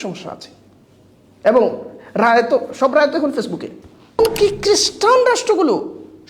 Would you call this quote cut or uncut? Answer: cut